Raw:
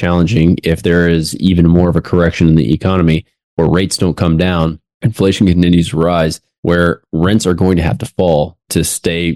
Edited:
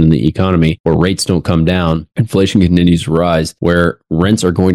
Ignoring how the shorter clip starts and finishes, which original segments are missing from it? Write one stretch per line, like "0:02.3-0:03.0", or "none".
0:03.2-0:03.5
0:04.8-0:05.0
0:06.4-0:06.5